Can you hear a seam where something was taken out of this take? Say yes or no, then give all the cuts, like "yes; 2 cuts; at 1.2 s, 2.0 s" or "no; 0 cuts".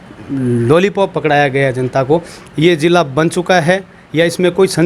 yes; 1 cut; at 2.4 s